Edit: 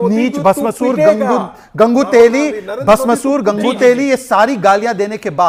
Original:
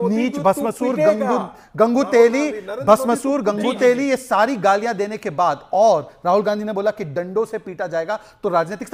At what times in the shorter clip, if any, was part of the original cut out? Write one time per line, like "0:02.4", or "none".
none